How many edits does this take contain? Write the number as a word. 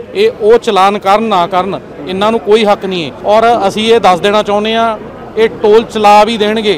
one